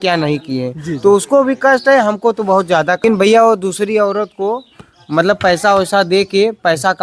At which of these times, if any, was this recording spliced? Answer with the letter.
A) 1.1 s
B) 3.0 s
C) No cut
B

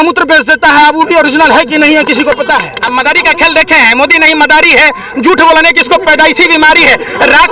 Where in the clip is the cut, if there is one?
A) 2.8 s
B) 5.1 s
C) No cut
A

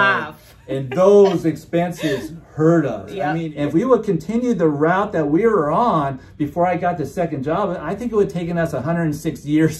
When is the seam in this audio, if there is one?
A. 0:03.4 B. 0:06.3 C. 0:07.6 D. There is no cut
A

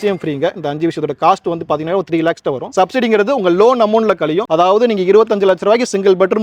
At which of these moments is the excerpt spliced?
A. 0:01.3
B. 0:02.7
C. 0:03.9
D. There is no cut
B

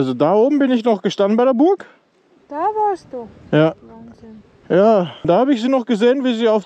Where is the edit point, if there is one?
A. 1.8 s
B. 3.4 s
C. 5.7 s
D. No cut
D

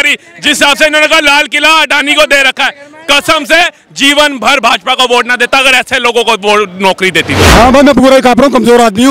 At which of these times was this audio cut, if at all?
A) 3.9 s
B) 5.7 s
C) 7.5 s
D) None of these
C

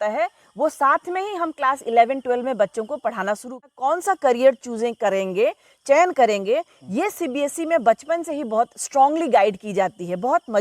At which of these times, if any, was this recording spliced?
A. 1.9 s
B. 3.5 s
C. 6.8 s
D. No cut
B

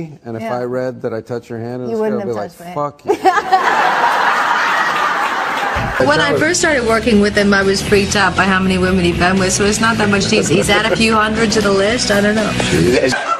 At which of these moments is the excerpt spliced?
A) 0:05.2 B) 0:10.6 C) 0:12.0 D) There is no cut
C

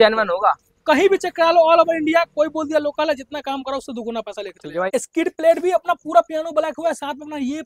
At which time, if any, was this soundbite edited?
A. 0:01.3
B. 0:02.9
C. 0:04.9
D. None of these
C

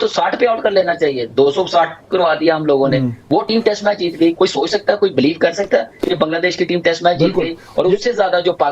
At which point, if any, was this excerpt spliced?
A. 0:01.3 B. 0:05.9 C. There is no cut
C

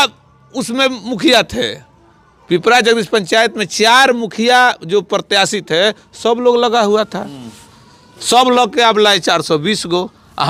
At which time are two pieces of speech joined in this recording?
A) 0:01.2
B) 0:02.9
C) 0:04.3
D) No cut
D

